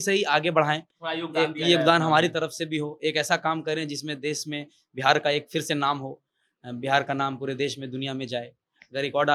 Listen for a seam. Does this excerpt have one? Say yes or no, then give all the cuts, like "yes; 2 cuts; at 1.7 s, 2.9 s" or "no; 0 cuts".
no; 0 cuts